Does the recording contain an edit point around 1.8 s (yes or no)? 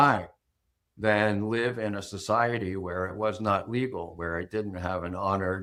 no